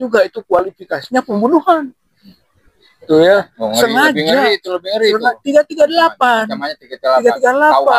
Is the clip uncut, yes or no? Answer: yes